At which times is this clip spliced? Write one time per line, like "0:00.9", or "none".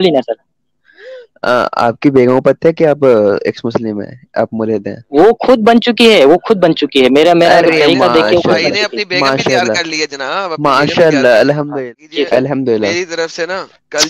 0:11.7